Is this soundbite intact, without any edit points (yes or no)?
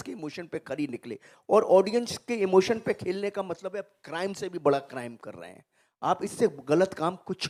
yes